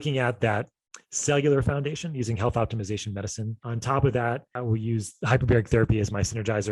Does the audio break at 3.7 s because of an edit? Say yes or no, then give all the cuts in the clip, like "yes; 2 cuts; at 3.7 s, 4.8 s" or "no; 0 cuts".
yes; 2 cuts; at 3.7 s, 4.5 s